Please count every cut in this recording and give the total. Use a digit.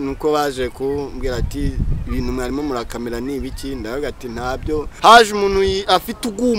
1